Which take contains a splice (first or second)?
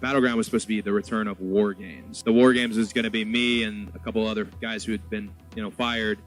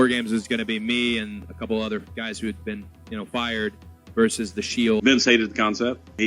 second